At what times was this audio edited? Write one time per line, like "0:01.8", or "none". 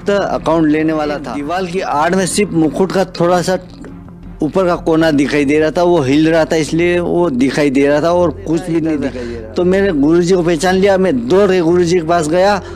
0:01.4
0:09.1